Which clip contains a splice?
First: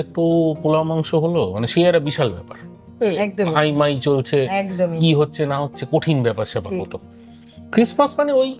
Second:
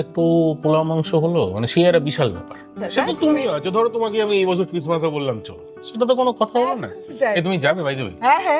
second; 1 cut; at 2.8 s

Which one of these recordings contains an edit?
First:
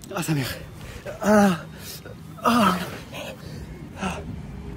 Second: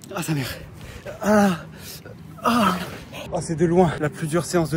second; 2 cuts; at 3.1 s, 4.0 s

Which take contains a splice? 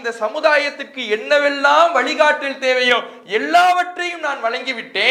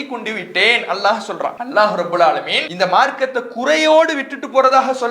second; 2 cuts; at 1.6 s, 2.6 s

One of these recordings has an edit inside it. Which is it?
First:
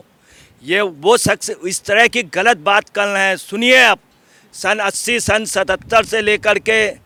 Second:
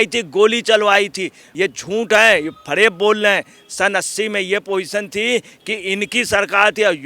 second; 1 cut; at 1.4 s

